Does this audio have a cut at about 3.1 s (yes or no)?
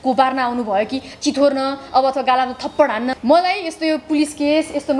yes